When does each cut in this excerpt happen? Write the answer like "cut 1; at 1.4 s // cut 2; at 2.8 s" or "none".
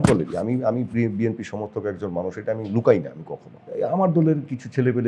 cut 1; at 3.6 s